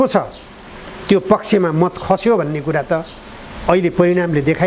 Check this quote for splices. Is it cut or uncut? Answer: uncut